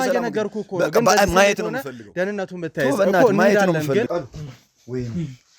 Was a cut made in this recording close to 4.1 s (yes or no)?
yes